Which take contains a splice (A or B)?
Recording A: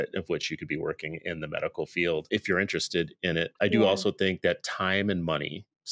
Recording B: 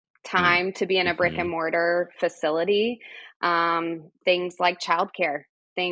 A